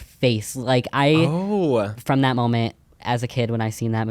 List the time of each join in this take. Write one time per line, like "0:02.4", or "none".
0:02.0